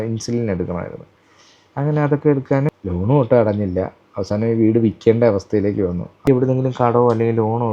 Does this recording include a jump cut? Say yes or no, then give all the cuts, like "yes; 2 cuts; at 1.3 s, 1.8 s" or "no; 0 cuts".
yes; 2 cuts; at 2.7 s, 6.2 s